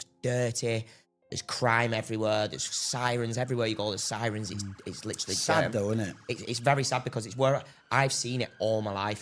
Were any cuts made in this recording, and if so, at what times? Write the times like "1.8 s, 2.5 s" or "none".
none